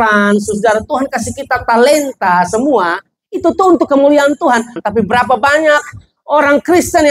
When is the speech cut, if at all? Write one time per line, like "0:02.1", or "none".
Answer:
0:04.8